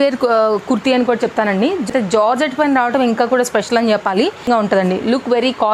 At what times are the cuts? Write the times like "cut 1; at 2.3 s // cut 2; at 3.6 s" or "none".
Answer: cut 1; at 1.9 s // cut 2; at 4.5 s